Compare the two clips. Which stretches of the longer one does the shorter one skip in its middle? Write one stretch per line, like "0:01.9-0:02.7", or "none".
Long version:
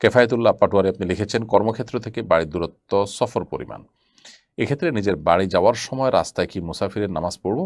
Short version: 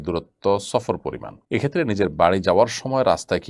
0:03.8-0:04.4